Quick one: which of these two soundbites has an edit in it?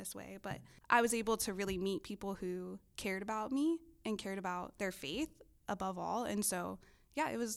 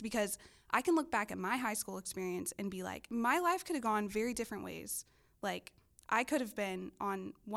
second; 1 cut; at 3.1 s

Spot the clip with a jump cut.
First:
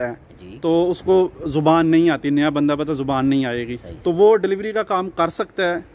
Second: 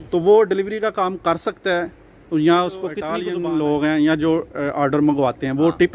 second; 1 cut; at 3.1 s

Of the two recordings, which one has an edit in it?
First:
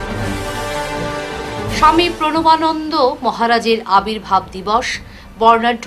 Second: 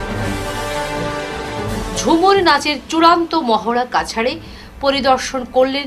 first; 1 cut; at 1.1 s

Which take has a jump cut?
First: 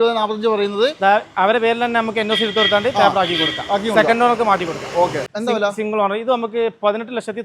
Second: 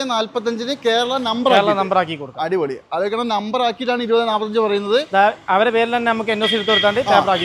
first; 1 cut; at 5.3 s

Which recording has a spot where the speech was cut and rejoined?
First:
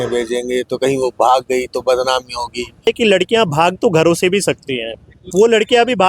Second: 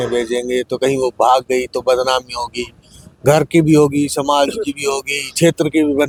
first; 1 cut; at 2.9 s

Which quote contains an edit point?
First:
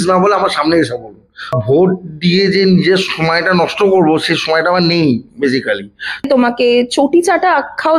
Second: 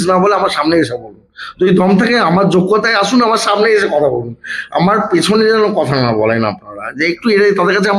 first; 2 cuts; at 1.5 s, 6.3 s

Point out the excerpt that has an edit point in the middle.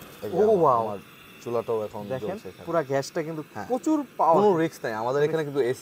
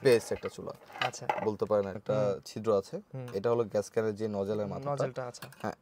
second; 1 cut; at 2.0 s

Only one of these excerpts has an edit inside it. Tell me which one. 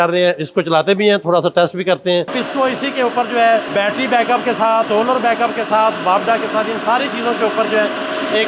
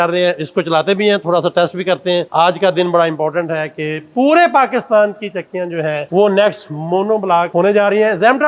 first; 3 cuts; at 2.3 s, 3.7 s, 4.9 s

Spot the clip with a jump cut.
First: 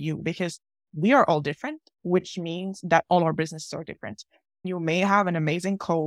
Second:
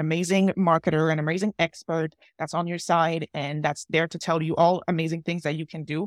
first; 1 cut; at 4.7 s

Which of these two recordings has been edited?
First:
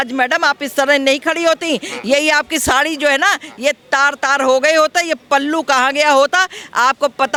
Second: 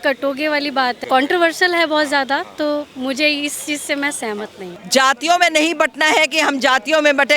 second; 2 cuts; at 1.0 s, 4.7 s

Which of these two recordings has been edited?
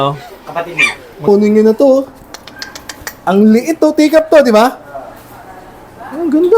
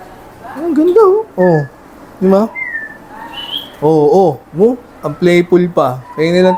first; 1 cut; at 1.2 s

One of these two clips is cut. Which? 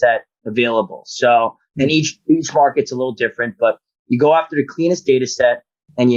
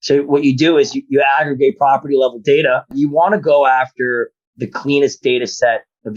second; 1 cut; at 3.0 s

